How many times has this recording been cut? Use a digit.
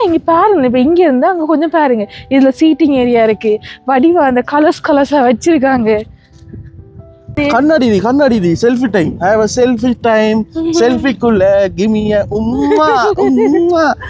1